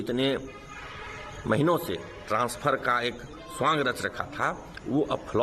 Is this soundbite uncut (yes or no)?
yes